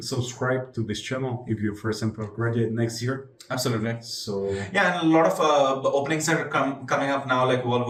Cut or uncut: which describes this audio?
uncut